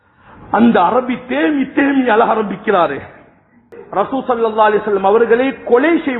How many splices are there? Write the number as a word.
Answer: one